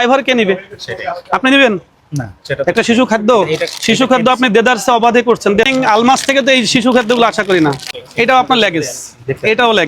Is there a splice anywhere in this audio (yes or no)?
yes